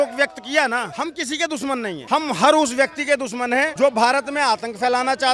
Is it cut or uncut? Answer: cut